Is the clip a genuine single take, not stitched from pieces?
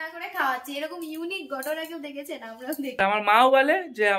no; 1 cut; at 3.0 s

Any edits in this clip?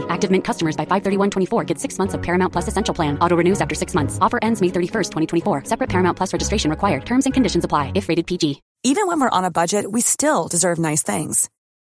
yes; 1 cut; at 8.7 s

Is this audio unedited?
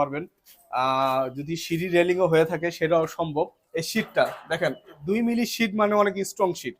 no; 1 cut; at 3.6 s

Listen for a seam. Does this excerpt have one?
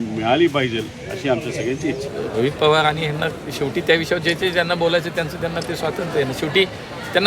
yes; 1 cut; at 2.1 s

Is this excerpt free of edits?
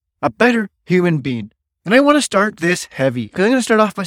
yes; 0 cuts

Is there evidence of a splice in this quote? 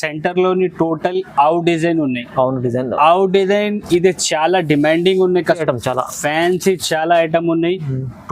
yes; 1 cut; at 5.6 s

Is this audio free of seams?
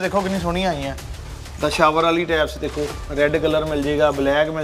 yes; 0 cuts

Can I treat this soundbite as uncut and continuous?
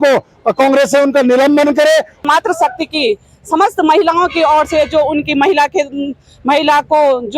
no; 1 cut; at 2.2 s

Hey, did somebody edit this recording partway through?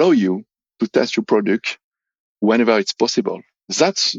yes; 1 cut; at 2.4 s

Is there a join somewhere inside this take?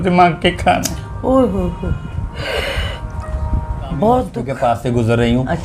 yes; 1 cut; at 4.4 s

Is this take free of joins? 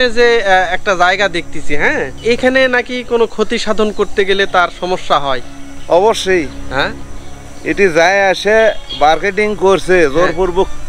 no; 1 cut; at 2.1 s

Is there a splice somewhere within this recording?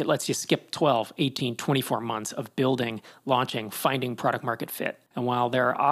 no; 0 cuts

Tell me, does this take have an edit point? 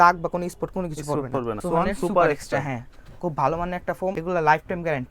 yes; 2 cuts; at 1.6 s, 4.2 s

